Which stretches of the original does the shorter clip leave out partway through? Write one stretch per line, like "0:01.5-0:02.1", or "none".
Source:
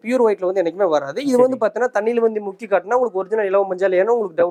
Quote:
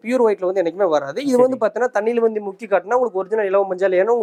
none